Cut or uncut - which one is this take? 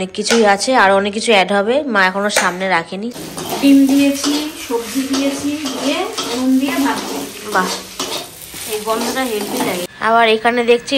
cut